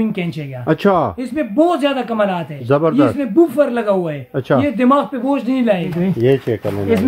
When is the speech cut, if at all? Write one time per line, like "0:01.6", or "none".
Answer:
0:05.9